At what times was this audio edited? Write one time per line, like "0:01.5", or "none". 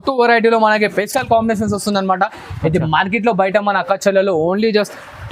none